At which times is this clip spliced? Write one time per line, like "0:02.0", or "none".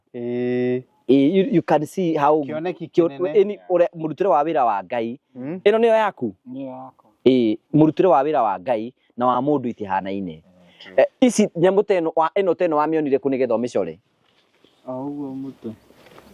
none